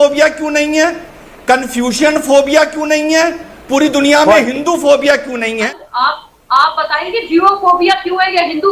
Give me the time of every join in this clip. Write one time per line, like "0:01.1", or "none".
0:05.7